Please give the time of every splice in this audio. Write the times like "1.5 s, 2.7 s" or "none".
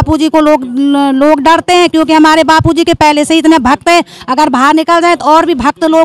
none